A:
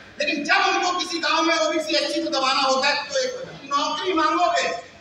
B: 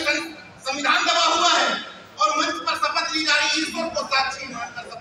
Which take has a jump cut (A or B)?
A